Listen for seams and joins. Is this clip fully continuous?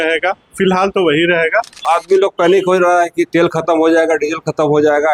no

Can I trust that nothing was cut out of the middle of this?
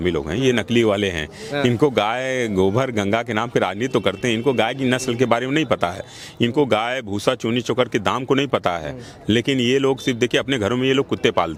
yes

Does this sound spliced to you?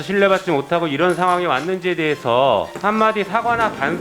yes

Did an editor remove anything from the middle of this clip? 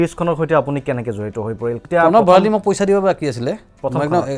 yes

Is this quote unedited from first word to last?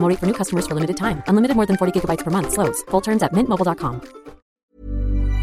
no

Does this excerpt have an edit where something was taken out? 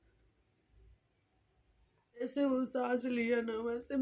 yes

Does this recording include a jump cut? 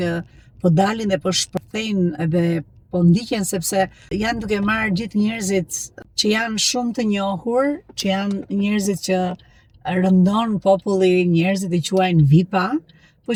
no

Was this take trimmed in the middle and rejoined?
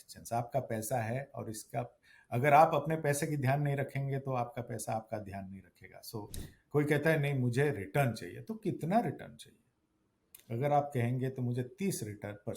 yes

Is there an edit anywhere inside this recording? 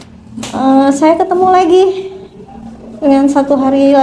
no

